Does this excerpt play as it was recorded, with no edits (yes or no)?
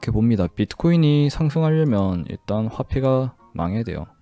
yes